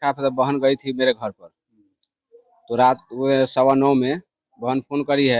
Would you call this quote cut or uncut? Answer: uncut